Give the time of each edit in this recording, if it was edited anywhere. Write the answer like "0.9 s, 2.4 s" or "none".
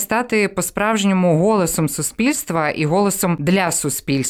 3.4 s